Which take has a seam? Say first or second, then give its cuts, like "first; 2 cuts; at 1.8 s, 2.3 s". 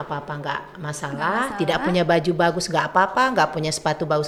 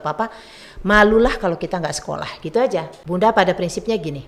second; 1 cut; at 3.0 s